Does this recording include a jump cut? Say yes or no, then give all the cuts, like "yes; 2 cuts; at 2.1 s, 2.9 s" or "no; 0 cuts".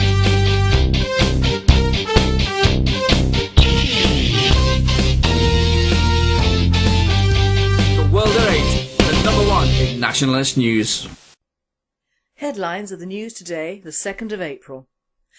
yes; 1 cut; at 13.1 s